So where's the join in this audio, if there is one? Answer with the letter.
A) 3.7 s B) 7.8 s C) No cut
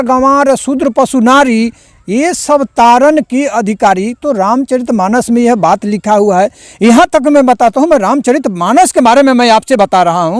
C